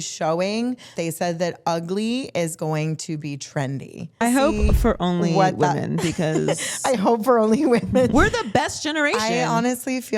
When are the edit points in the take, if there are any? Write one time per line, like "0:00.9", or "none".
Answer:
0:01.0
0:04.2
0:08.1